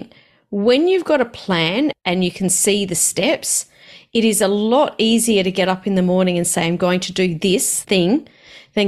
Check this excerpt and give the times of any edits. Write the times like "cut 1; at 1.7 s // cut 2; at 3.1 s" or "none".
cut 1; at 1.9 s // cut 2; at 7.7 s